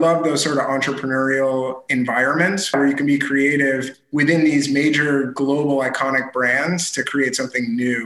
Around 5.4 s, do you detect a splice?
no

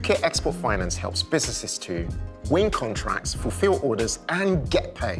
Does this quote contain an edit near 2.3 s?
no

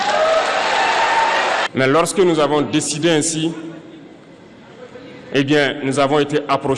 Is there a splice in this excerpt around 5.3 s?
no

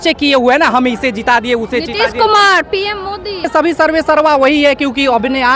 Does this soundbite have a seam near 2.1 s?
no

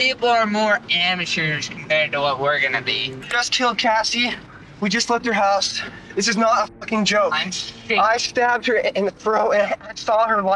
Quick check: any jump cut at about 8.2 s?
no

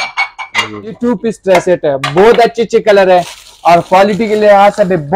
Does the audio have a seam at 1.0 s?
yes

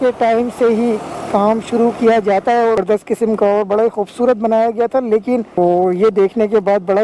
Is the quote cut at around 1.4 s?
no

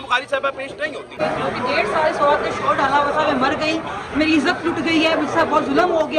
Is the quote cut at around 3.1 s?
no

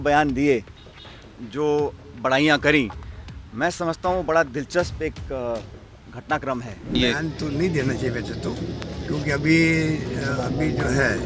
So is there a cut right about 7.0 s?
yes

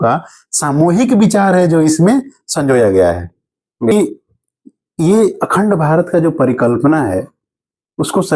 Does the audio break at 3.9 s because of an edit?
yes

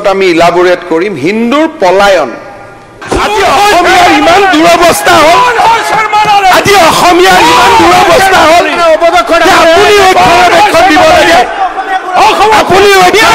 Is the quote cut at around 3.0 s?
yes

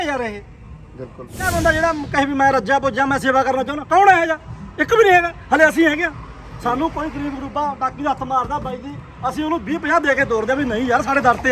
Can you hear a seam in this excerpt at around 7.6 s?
no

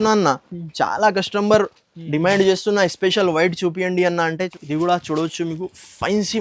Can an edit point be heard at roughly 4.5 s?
yes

